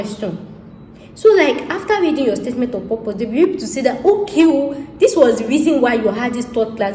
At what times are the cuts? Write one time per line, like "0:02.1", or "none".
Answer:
none